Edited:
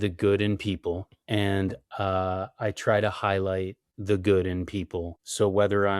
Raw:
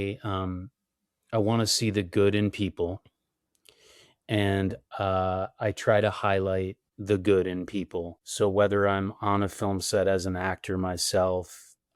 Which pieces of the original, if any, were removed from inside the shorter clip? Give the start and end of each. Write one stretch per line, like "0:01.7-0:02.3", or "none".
0:03.1-0:04.1